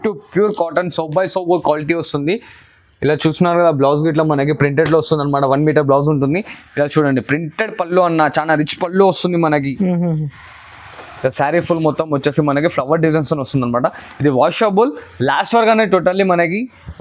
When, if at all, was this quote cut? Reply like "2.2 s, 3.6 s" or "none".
none